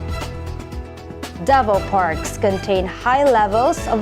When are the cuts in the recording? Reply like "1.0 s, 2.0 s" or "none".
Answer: 1.4 s